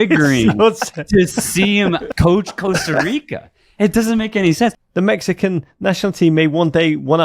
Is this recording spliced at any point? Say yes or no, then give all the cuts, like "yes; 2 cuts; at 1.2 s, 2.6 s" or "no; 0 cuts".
yes; 2 cuts; at 2.1 s, 4.9 s